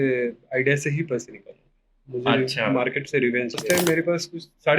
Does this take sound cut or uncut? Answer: cut